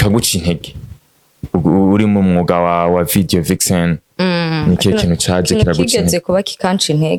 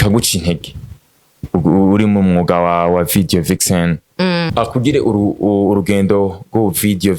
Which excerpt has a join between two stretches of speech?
second; 1 cut; at 4.5 s

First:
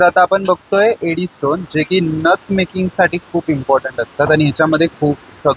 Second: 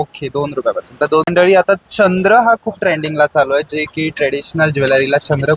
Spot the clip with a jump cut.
second; 1 cut; at 1.3 s

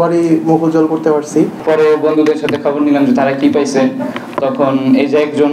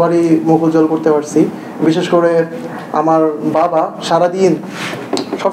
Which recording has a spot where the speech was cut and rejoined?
first; 1 cut; at 1.6 s

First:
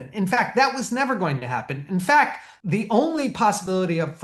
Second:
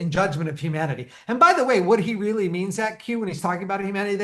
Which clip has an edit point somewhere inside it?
first; 1 cut; at 2.5 s

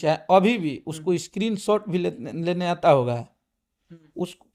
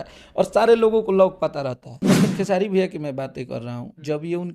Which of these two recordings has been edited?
second; 1 cut; at 1.9 s

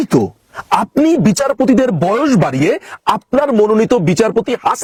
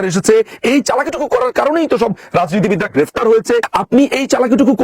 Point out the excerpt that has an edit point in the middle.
second; 1 cut; at 3.7 s

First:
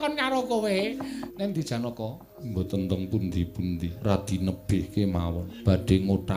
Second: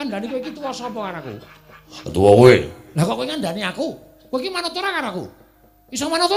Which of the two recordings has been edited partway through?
first; 4 cuts; at 1.2 s, 2.3 s, 3.9 s, 5.5 s

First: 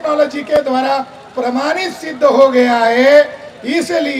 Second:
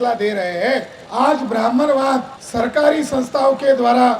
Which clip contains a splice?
second; 2 cuts; at 1.0 s, 2.4 s

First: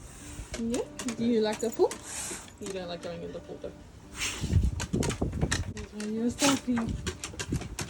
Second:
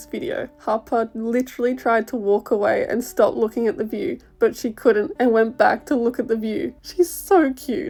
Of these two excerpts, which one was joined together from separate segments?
first; 1 cut; at 5.7 s

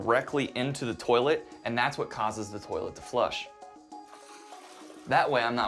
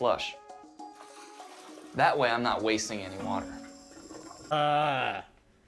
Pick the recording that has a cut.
second; 1 cut; at 4.5 s

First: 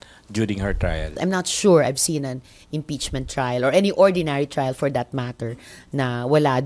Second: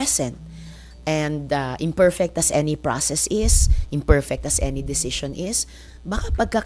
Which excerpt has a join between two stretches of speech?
first; 1 cut; at 1.1 s

